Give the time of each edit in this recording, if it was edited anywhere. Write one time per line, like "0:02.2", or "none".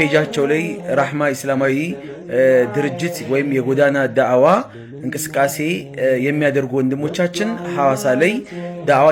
none